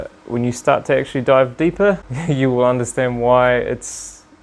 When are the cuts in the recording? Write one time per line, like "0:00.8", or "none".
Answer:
0:02.1